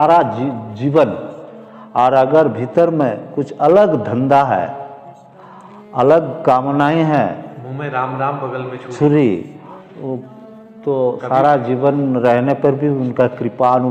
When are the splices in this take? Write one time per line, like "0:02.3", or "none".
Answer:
none

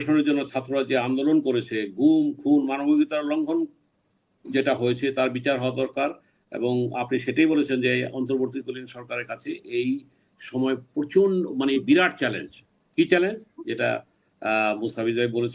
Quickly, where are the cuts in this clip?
none

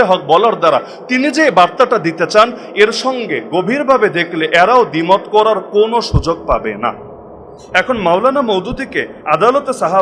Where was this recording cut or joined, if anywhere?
0:07.6

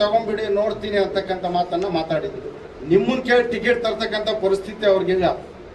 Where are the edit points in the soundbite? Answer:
0:02.6

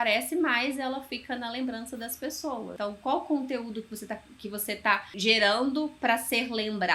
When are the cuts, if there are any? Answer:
0:02.7
0:05.1

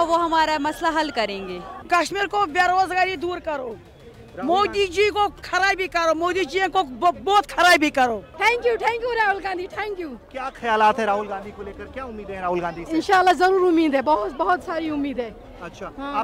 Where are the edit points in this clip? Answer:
0:01.8
0:08.3

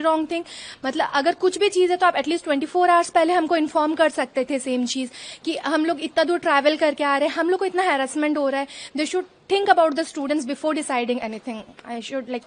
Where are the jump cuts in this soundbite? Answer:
none

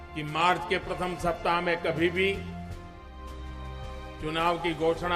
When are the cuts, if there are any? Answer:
0:02.4
0:04.2

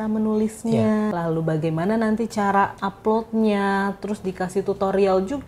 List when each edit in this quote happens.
0:01.1
0:02.8

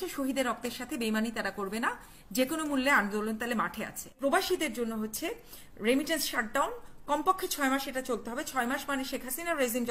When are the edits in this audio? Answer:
0:04.1

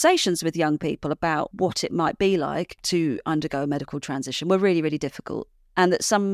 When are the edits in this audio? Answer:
0:01.5

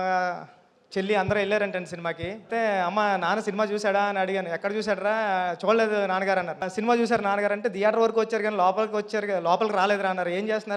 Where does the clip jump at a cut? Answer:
0:02.5
0:06.6

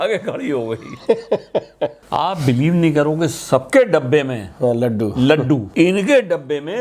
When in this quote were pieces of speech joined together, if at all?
0:02.0
0:05.7

